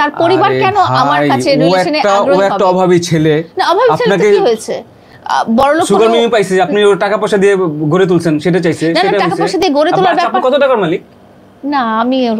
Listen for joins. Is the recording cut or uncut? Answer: uncut